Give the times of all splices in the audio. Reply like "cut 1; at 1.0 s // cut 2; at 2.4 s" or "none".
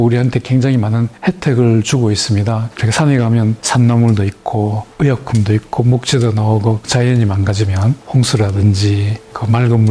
cut 1; at 1.1 s // cut 2; at 2.7 s // cut 3; at 3.6 s // cut 4; at 4.8 s // cut 5; at 6.8 s // cut 6; at 8.0 s